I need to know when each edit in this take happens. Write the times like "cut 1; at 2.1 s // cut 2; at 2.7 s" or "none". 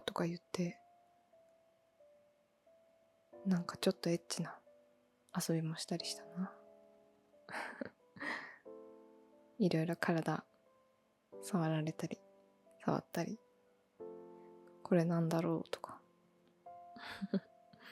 cut 1; at 13.8 s // cut 2; at 14.8 s